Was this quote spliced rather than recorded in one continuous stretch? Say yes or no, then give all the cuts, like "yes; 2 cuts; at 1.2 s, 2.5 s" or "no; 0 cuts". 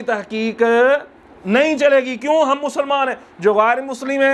no; 0 cuts